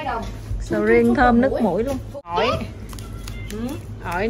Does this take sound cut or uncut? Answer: cut